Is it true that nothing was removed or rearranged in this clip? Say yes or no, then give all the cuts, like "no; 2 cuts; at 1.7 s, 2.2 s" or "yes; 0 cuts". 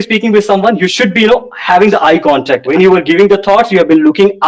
no; 1 cut; at 2.6 s